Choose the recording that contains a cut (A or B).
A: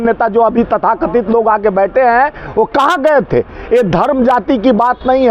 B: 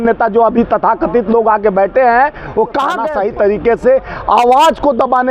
B